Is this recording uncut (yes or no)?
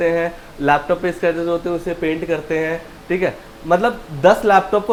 yes